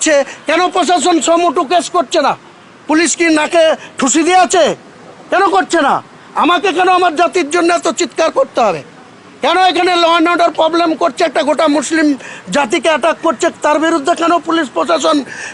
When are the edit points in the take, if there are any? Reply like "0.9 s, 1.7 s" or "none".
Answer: none